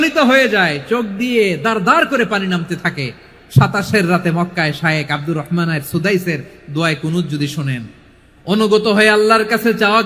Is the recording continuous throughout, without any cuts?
yes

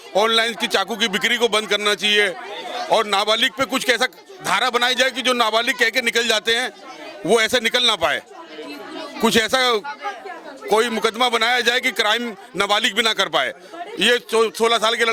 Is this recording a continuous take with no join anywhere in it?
yes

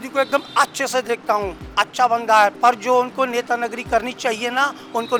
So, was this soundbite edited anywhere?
no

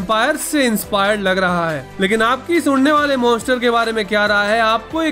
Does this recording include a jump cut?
no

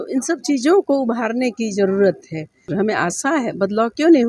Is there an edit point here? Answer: yes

